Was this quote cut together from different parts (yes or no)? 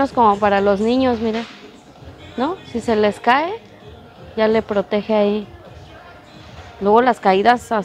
no